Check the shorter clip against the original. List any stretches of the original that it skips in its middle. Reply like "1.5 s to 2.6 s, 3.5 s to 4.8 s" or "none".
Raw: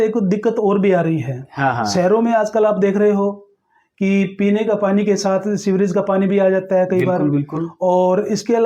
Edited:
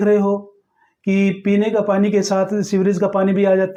none